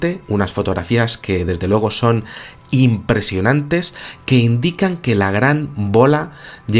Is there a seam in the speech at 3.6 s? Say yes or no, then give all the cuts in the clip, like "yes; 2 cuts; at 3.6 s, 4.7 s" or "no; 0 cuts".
yes; 1 cut; at 3.6 s